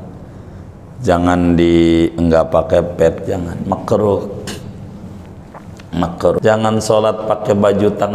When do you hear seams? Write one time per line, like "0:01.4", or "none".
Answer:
0:06.4